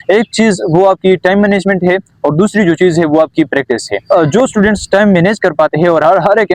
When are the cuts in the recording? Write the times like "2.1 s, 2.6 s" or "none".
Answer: 4.1 s